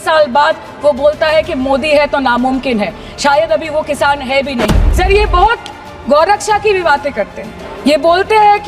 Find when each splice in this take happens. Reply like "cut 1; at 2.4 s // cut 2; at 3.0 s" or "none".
cut 1; at 4.8 s // cut 2; at 7.7 s